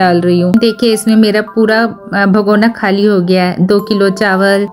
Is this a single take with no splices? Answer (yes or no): yes